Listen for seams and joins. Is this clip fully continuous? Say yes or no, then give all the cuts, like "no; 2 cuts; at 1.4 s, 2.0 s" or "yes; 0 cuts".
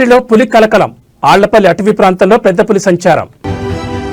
yes; 0 cuts